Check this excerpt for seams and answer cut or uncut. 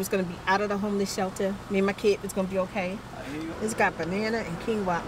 cut